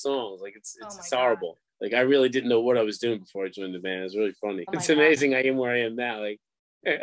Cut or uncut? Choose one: cut